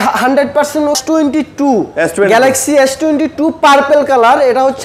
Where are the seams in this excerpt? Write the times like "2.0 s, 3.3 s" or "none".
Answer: 1.0 s